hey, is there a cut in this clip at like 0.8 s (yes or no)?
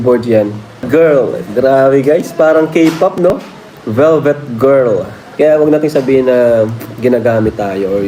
yes